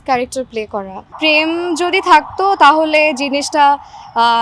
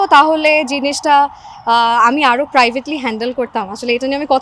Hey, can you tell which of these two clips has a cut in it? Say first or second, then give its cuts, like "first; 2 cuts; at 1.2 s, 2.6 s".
first; 1 cut; at 1.1 s